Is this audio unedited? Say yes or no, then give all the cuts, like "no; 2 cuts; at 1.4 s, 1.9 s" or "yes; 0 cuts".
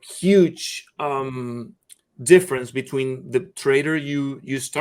yes; 0 cuts